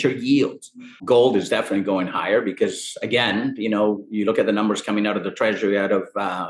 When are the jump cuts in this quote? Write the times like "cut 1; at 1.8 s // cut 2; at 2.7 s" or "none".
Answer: cut 1; at 1.0 s

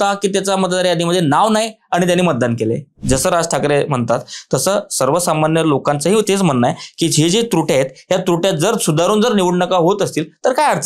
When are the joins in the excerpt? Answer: cut 1; at 2.9 s

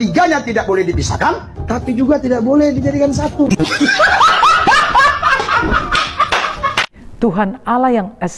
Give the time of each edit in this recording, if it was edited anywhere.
cut 1; at 7.0 s

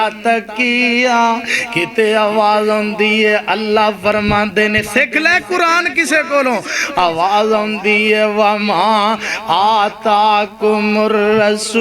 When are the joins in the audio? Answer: none

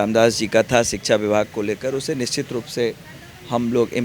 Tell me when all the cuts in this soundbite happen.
none

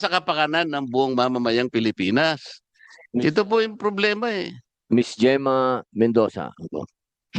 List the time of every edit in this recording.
none

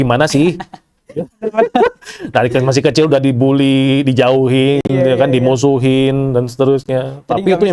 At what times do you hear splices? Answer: none

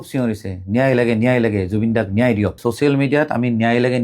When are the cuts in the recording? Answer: cut 1; at 2.6 s

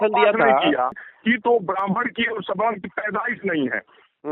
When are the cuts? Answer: cut 1; at 1.0 s

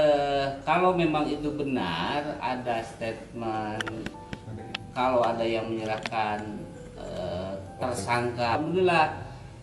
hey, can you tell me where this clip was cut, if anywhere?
cut 1; at 8.6 s

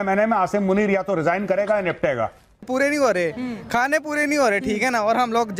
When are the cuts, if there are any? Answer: cut 1; at 2.5 s

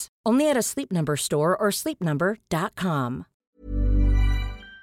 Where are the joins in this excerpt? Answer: cut 1; at 3.5 s

